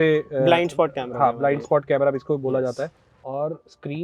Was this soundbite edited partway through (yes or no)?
yes